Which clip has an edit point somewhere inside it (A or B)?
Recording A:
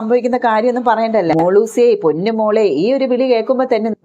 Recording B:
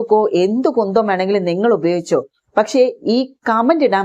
A